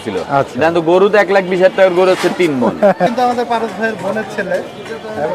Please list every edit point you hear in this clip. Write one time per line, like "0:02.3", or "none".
0:03.1